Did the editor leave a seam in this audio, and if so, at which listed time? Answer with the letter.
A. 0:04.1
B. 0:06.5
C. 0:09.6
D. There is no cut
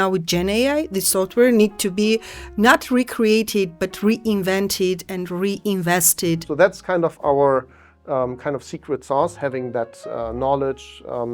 B